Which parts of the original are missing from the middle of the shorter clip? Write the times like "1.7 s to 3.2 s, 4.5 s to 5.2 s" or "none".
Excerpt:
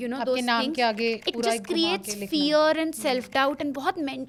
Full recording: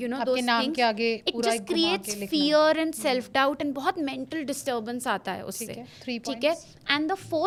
none

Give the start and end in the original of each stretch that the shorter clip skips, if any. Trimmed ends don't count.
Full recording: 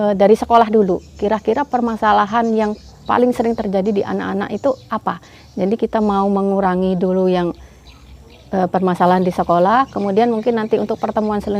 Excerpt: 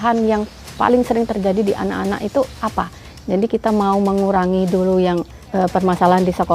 7.7 s to 8.4 s

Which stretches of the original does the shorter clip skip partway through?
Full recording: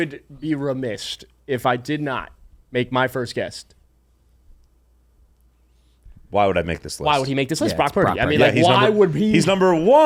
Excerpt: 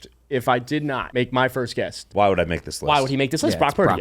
2.2 s to 2.6 s, 3.6 s to 6.2 s

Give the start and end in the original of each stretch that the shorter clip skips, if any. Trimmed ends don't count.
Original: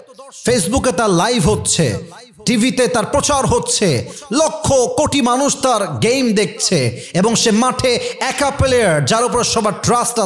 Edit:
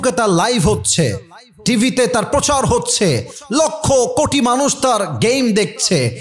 none

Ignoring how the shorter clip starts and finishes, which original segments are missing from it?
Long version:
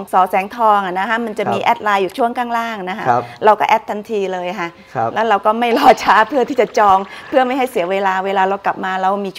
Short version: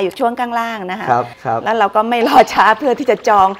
3.3 s to 4.8 s

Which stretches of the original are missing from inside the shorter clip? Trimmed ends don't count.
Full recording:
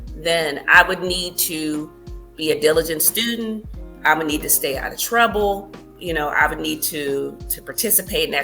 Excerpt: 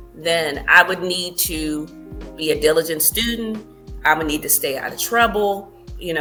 none

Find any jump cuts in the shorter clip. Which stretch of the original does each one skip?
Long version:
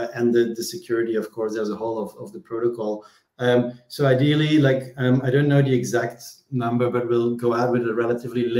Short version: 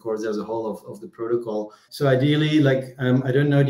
3.1 s to 3.8 s

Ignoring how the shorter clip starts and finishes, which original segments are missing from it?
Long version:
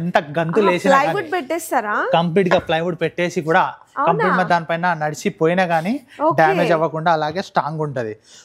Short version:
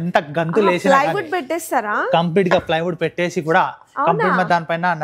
none

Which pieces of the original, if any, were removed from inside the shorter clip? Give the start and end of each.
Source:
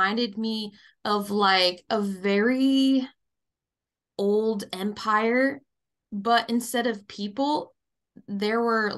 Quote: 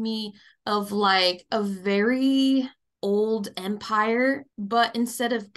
3.2 s to 4.0 s, 5.7 s to 6.1 s

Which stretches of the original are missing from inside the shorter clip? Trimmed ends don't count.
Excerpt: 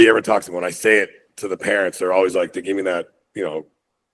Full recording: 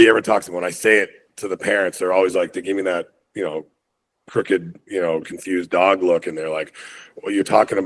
none

